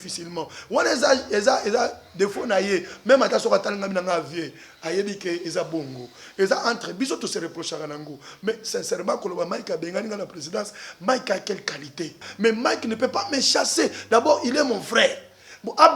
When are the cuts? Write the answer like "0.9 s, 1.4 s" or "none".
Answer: 12.3 s